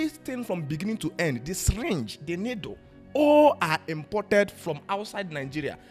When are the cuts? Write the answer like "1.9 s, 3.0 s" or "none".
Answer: none

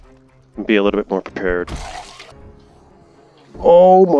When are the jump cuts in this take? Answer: 2.3 s

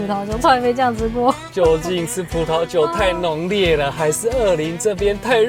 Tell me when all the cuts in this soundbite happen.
1.4 s

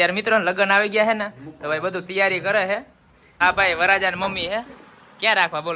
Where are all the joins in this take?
3.2 s

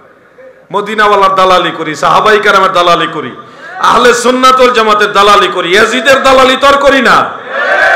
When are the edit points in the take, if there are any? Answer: none

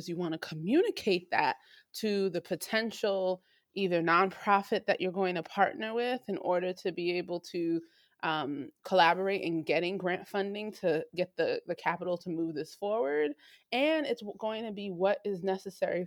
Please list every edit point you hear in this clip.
none

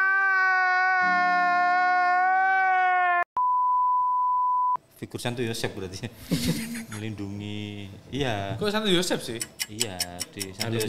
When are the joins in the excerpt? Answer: 4.9 s

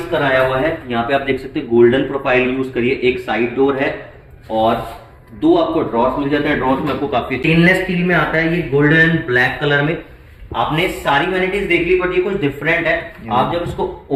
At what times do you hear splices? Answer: 7.4 s

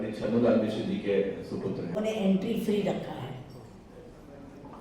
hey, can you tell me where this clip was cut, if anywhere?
2.0 s

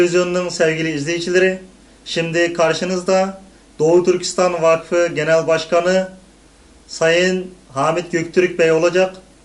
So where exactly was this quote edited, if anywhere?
none

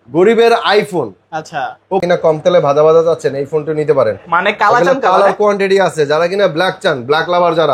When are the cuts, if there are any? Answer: 2.0 s

